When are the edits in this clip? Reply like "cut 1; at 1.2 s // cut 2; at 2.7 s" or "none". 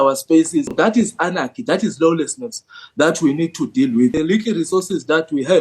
cut 1; at 0.7 s // cut 2; at 4.2 s